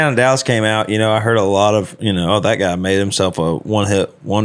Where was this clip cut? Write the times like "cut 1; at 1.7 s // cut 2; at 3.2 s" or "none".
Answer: cut 1; at 2.0 s

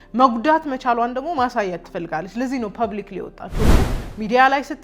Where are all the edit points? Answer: cut 1; at 3.7 s

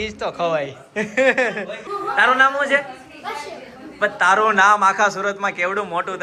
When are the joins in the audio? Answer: cut 1; at 1.8 s

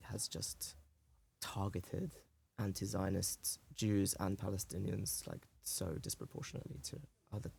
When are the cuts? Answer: none

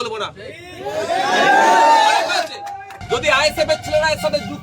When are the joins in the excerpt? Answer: cut 1; at 2.9 s

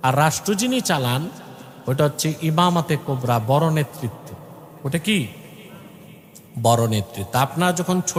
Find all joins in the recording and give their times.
none

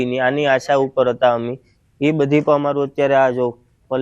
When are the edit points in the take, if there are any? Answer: cut 1; at 1.1 s

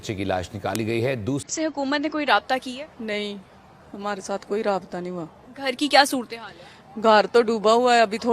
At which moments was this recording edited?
cut 1; at 1.5 s

